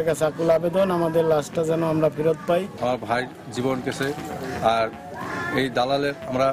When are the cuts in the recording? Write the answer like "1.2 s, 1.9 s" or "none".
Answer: 2.8 s